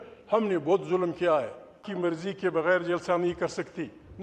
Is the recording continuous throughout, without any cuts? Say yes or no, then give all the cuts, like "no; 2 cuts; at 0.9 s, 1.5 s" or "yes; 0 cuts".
no; 1 cut; at 1.9 s